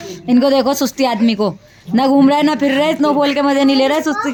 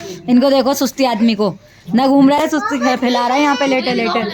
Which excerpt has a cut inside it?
second; 1 cut; at 2.4 s

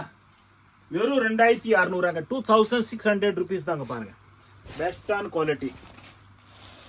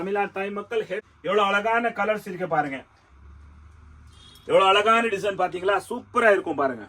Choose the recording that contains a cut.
second; 1 cut; at 1.0 s

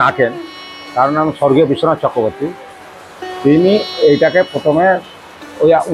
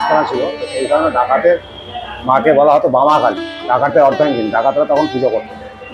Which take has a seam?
second; 1 cut; at 3.5 s

